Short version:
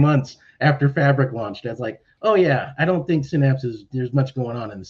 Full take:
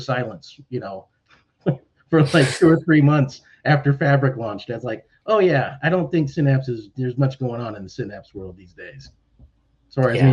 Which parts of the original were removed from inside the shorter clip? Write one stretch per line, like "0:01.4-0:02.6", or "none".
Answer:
none